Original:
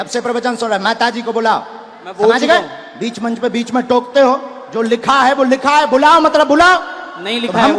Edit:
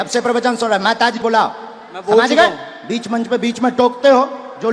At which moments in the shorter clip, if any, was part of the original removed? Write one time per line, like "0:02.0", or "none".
0:01.2